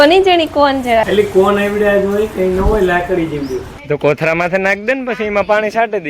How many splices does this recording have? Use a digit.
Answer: 2